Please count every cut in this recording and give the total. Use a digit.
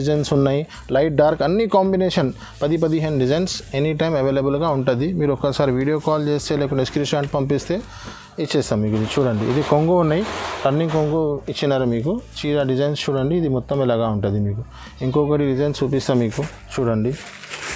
0